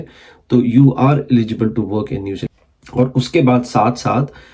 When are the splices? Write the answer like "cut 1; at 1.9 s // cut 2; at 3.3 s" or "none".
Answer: cut 1; at 2.4 s